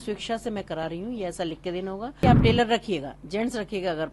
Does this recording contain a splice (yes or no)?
yes